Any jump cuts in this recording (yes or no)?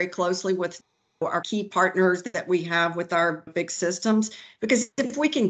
yes